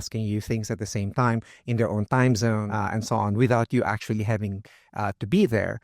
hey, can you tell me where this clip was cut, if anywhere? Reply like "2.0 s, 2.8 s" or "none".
2.7 s